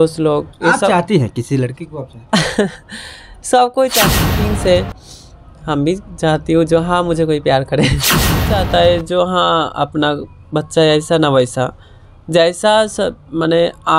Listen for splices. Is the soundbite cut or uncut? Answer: cut